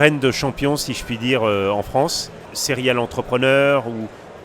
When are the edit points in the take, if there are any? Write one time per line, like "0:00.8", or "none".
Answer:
0:02.5